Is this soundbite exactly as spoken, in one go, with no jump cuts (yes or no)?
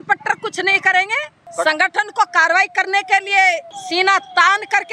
no